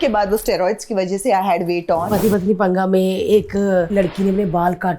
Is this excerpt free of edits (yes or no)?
no